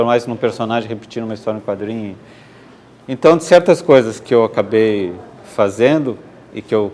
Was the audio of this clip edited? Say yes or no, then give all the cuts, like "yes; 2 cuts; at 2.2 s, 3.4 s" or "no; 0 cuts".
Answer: no; 0 cuts